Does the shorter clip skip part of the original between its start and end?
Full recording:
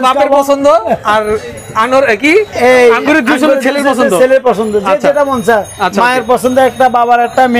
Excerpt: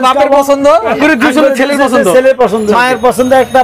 yes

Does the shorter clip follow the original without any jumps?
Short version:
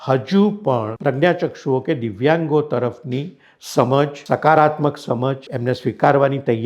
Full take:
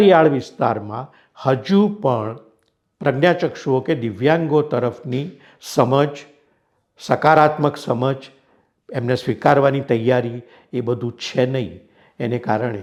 no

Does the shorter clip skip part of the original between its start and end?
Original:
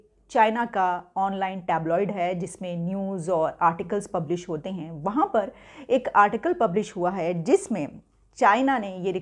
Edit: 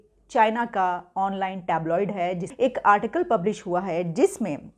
yes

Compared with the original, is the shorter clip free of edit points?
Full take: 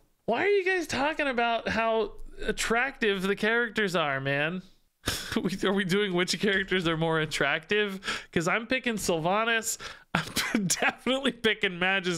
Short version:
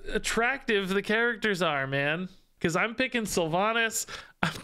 no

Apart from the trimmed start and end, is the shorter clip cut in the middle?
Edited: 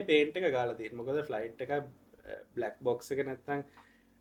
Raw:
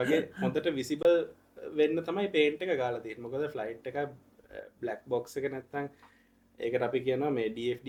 no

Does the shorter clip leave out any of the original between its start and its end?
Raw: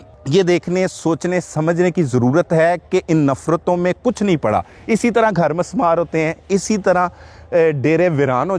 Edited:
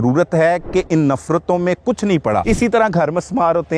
yes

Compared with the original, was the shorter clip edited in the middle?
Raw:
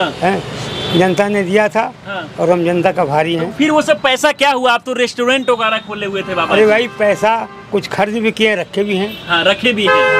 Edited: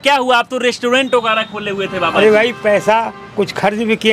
no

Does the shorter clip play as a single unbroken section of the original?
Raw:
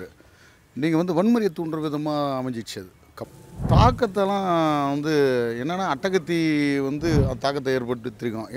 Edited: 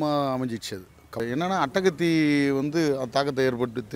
no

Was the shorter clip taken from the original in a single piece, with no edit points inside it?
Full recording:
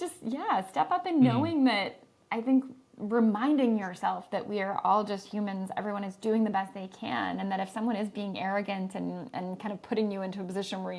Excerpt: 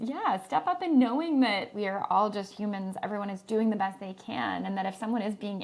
no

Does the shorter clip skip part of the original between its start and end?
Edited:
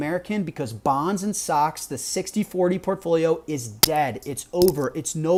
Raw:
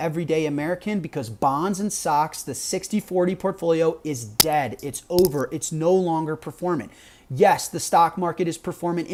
no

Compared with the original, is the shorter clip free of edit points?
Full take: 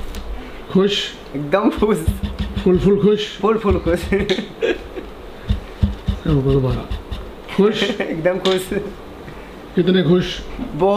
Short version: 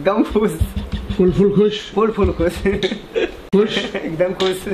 no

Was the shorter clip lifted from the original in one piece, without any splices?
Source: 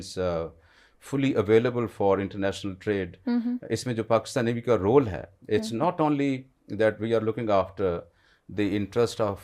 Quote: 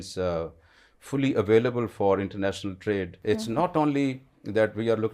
no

